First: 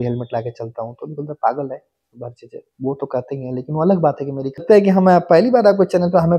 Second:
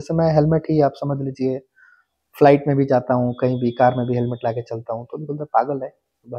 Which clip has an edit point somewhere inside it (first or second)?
first